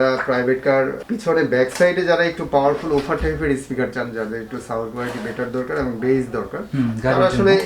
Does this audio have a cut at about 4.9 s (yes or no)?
no